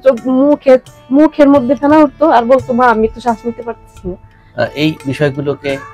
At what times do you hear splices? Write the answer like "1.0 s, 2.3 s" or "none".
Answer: 4.3 s